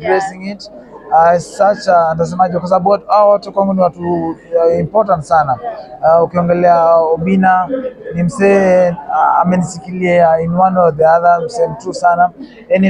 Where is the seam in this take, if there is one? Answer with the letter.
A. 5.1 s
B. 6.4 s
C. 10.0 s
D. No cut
D